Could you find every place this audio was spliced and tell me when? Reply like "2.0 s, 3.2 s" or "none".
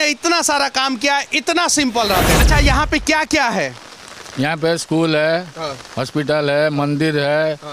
2.4 s